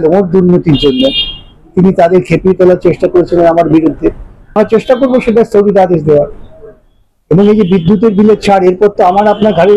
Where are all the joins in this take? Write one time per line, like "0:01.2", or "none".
0:04.5